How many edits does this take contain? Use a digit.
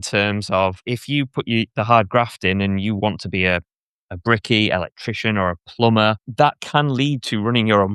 2